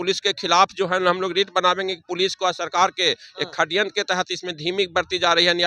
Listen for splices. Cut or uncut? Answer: uncut